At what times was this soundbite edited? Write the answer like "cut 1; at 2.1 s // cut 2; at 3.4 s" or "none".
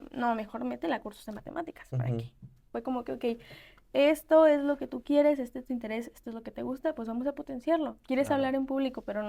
cut 1; at 2.7 s